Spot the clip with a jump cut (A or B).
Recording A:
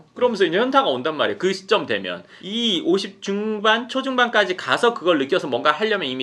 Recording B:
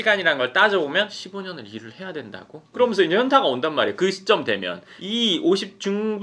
B